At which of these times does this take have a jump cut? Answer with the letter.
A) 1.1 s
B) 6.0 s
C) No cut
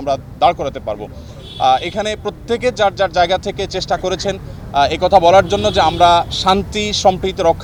C